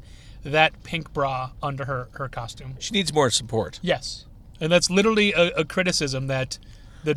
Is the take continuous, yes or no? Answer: yes